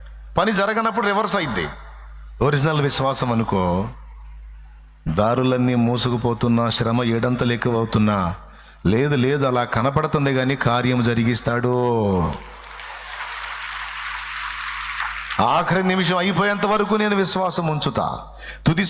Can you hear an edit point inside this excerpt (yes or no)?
no